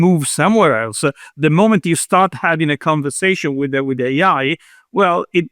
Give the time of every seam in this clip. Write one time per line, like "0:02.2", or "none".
none